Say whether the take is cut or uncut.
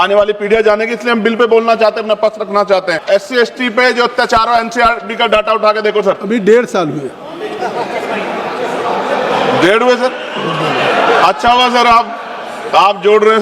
cut